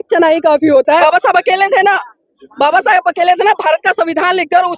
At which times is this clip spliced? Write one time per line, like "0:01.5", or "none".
0:01.0